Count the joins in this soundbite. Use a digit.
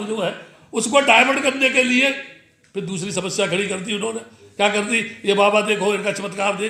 0